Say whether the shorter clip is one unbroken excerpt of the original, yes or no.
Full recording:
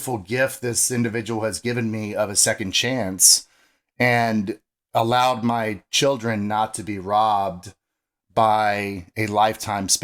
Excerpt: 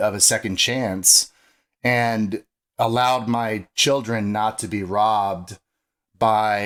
yes